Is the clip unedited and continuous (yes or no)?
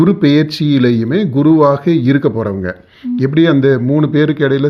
yes